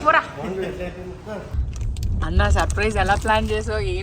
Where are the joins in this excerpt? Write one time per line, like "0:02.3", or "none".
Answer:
0:01.7